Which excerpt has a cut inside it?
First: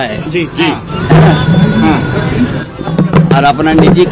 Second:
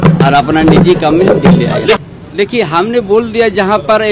second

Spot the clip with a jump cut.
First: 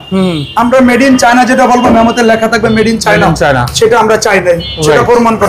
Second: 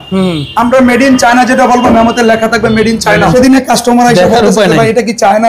second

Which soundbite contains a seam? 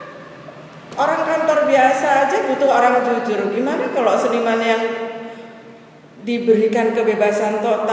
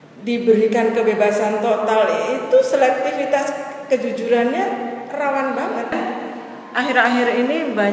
second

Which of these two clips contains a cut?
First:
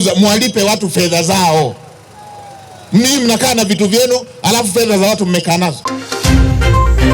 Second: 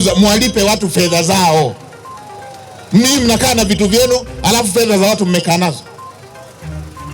first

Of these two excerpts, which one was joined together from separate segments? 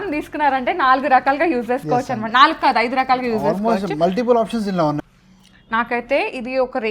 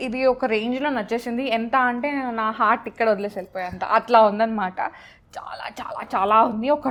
first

